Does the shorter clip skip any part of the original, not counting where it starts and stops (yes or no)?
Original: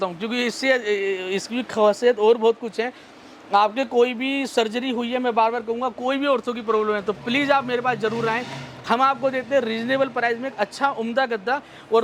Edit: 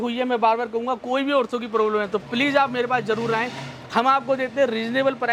no